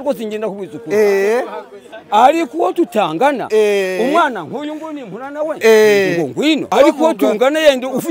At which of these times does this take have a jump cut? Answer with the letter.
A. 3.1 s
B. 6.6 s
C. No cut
B